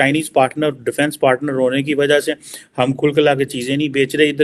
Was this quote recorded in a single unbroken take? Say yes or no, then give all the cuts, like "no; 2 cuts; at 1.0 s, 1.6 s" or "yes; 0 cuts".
yes; 0 cuts